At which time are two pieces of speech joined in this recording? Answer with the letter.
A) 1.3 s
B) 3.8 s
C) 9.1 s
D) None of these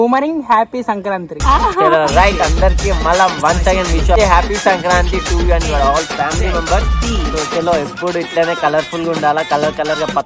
A